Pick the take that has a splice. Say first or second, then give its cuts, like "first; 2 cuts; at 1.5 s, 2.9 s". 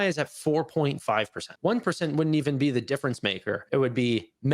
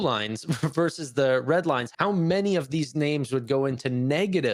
first; 1 cut; at 1.5 s